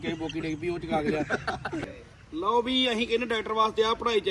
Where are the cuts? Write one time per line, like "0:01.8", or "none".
0:01.7